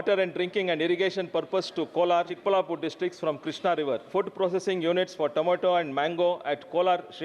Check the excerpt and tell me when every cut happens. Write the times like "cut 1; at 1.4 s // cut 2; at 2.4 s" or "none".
cut 1; at 2.3 s // cut 2; at 4.0 s